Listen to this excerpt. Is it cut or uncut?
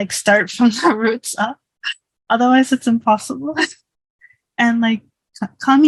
uncut